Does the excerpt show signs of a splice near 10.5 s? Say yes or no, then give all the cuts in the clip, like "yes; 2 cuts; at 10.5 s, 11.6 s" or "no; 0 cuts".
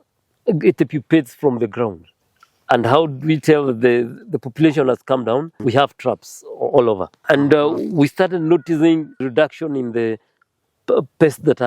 no; 4 cuts; at 2.1 s, 5.5 s, 7.2 s, 9.3 s